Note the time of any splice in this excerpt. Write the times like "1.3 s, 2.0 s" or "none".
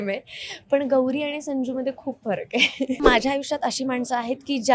3.0 s